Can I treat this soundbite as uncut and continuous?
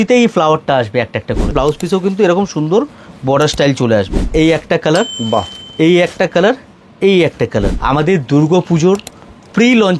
no; 3 cuts; at 1.5 s, 4.3 s, 7.7 s

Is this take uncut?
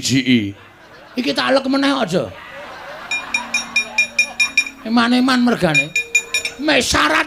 yes; 0 cuts

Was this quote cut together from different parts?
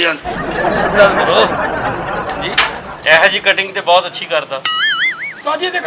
yes; 1 cut; at 2.9 s

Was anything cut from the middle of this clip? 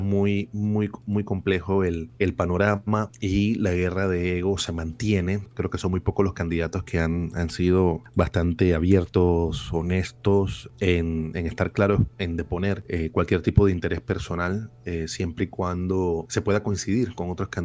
yes; 7 cuts; at 2.1 s, 3.1 s, 5.5 s, 8.0 s, 10.6 s, 12.8 s, 16.3 s

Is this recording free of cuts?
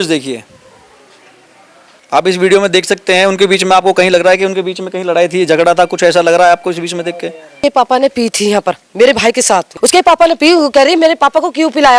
no; 2 cuts; at 7.6 s, 9.7 s

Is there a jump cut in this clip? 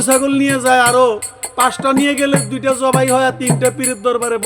no; 0 cuts

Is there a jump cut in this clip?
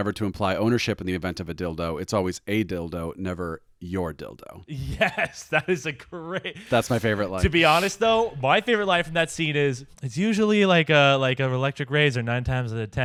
no; 0 cuts

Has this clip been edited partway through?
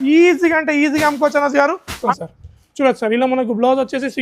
yes; 1 cut; at 2.1 s

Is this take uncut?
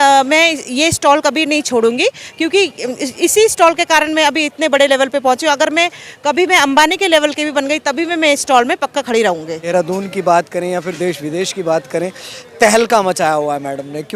no; 1 cut; at 9.6 s

